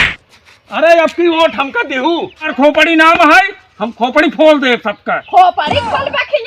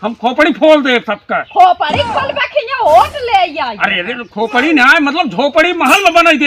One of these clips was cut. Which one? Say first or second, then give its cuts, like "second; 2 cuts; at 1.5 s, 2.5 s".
first; 1 cut; at 2.5 s